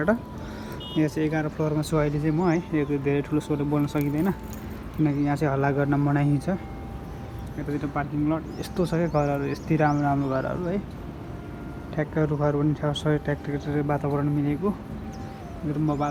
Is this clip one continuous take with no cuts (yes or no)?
yes